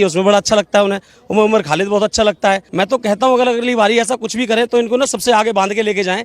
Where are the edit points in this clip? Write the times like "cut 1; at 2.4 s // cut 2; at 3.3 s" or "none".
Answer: cut 1; at 2.7 s